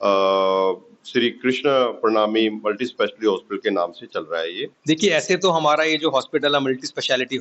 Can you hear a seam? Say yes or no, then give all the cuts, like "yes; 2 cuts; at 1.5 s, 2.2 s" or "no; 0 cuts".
yes; 1 cut; at 4.7 s